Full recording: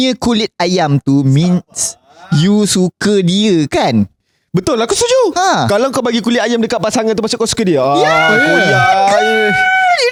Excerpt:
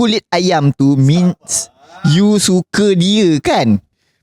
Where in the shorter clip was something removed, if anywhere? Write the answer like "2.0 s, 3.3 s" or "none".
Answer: none